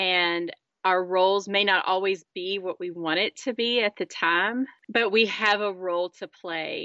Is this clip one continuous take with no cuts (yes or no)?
yes